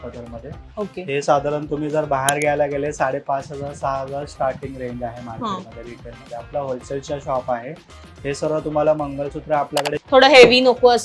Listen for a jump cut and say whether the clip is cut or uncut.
cut